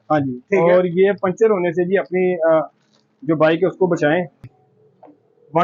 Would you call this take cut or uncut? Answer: cut